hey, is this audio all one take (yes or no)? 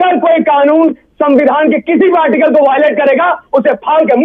yes